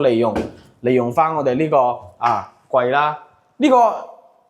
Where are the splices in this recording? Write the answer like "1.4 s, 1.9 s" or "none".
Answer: none